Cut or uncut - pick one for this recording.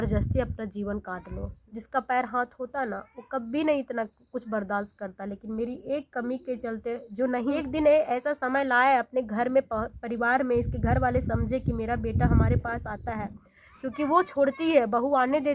cut